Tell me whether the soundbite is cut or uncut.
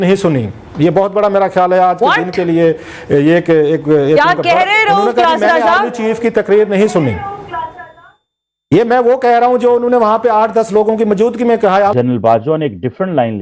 cut